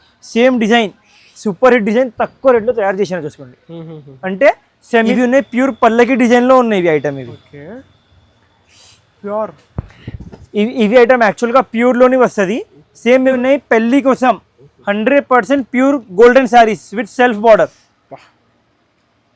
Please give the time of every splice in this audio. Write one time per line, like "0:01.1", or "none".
0:05.1
0:13.3